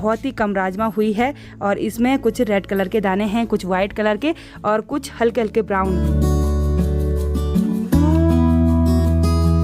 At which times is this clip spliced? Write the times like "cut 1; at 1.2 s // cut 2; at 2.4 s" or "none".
none